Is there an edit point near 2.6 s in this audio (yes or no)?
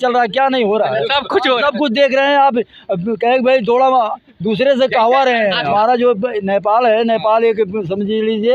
no